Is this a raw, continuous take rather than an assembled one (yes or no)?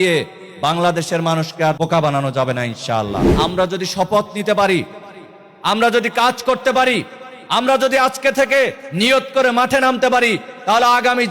no